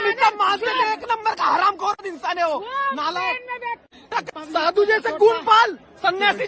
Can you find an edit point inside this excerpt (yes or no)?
yes